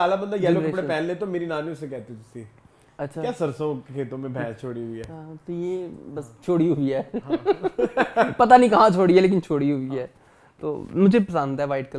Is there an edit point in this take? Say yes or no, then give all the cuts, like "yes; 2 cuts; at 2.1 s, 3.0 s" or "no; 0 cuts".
no; 0 cuts